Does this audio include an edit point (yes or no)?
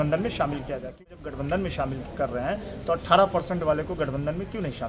yes